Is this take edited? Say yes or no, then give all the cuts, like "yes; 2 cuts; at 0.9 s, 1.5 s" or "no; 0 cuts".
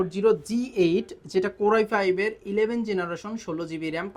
no; 0 cuts